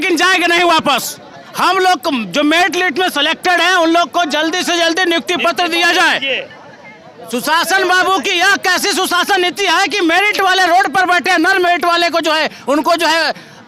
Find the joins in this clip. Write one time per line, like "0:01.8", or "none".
none